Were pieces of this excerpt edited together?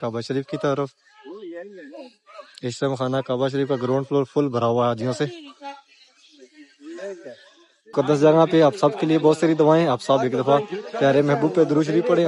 yes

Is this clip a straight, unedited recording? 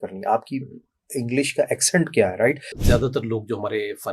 no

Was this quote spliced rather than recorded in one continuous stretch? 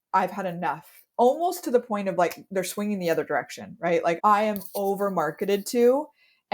yes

